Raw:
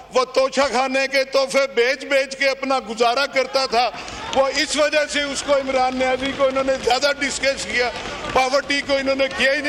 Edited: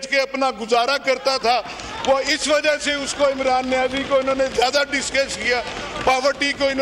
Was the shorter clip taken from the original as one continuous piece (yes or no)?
yes